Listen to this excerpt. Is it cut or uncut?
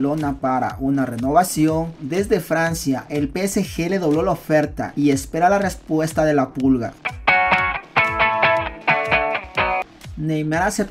cut